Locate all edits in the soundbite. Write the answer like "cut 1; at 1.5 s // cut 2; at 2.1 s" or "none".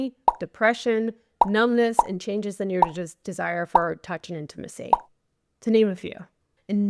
none